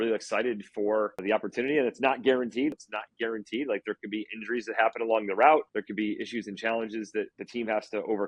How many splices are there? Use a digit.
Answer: 4